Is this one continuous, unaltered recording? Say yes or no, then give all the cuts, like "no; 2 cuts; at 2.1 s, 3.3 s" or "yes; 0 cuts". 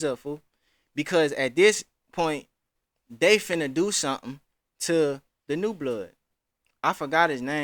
yes; 0 cuts